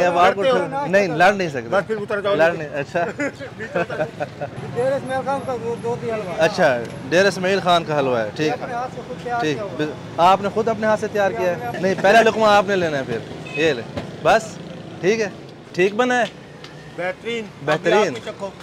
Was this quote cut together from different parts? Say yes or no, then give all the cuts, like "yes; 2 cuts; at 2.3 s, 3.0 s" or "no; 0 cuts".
no; 0 cuts